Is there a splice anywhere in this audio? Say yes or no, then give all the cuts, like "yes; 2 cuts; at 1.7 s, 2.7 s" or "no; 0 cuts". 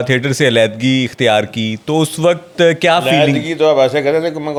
no; 0 cuts